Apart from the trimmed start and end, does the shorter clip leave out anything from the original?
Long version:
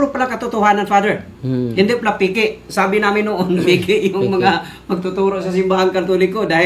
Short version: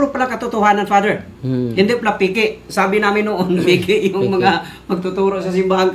no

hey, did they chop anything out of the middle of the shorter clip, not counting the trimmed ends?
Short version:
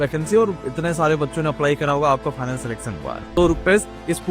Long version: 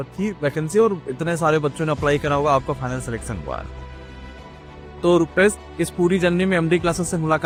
yes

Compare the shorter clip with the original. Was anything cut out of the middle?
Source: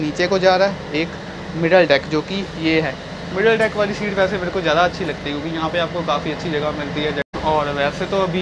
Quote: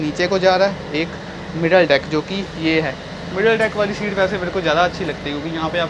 no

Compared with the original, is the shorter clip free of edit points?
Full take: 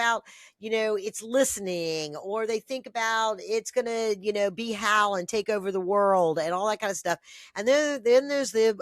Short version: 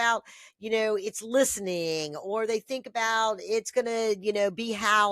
yes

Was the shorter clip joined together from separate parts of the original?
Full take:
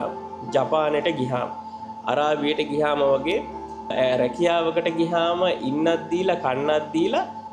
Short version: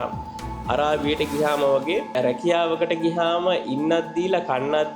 yes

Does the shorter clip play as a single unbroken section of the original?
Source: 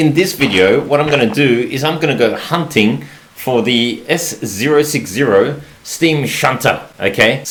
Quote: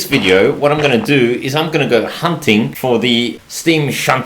no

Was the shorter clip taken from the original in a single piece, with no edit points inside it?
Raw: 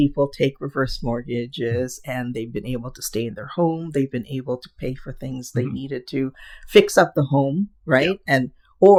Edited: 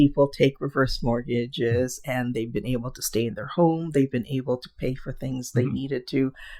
yes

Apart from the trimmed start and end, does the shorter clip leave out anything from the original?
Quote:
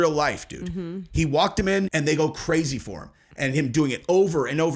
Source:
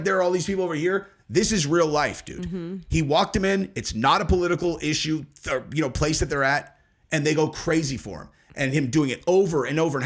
yes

